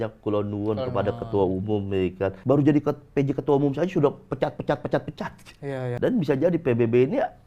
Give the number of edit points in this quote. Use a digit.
2